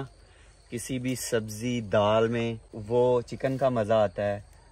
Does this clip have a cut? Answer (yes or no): yes